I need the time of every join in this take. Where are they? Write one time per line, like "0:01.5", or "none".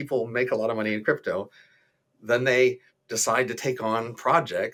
none